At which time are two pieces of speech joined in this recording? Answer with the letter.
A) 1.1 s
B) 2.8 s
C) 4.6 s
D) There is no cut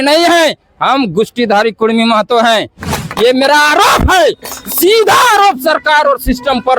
B